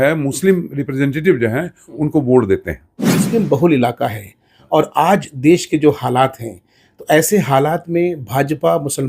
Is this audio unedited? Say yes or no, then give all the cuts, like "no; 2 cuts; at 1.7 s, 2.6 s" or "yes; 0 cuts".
no; 1 cut; at 3.2 s